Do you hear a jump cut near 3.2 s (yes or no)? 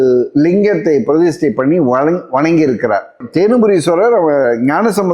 yes